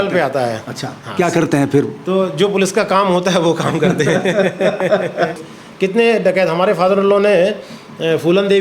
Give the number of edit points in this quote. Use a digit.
1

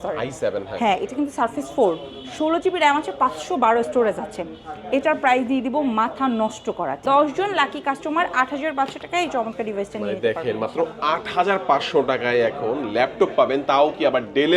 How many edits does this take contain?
1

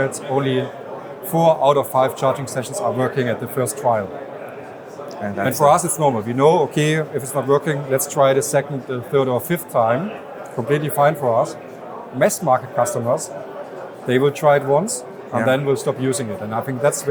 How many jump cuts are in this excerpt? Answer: 0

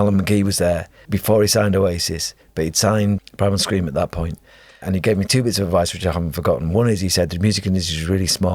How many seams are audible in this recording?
3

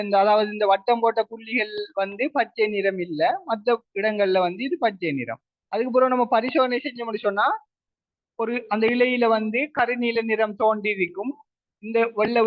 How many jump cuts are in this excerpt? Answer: 0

